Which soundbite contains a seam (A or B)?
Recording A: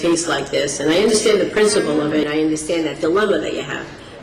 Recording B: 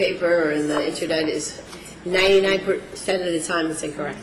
A